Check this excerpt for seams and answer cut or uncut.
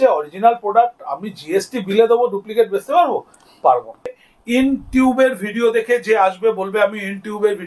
cut